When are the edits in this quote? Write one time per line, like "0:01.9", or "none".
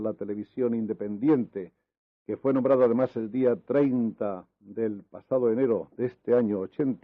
0:01.0
0:03.6